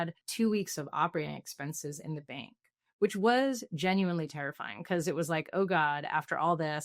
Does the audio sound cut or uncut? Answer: uncut